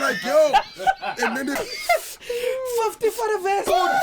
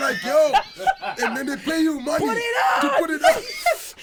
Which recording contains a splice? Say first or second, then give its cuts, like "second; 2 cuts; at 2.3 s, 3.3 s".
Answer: first; 1 cut; at 1.6 s